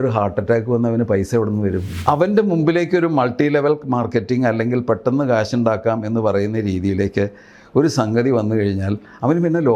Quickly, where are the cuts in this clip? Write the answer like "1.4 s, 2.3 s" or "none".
1.9 s